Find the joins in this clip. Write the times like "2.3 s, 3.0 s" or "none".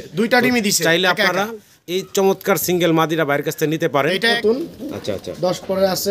4.4 s